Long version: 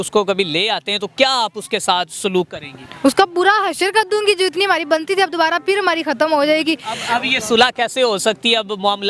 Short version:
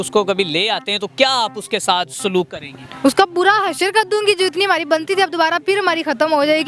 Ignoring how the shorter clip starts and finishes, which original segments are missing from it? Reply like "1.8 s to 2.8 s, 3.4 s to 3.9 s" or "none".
none